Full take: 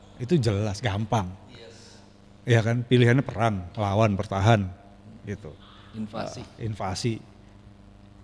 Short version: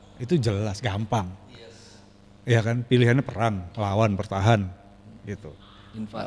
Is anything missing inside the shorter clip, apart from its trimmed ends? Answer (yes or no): no